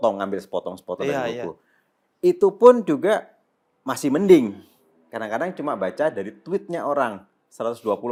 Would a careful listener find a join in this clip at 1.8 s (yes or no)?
no